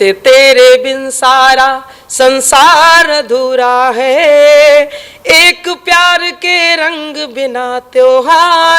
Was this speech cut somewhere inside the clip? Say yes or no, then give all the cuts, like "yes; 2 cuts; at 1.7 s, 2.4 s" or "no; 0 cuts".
no; 0 cuts